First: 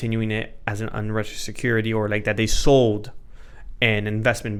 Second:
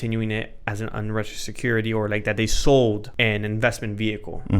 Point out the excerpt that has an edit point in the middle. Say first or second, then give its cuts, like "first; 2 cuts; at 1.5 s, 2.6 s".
second; 1 cut; at 3.1 s